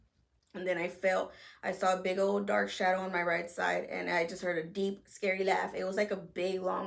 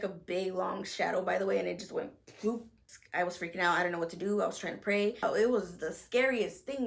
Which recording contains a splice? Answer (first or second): second